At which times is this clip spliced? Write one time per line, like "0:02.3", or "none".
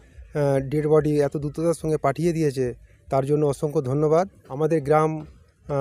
0:04.4